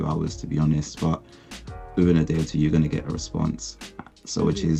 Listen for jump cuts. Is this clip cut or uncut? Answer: uncut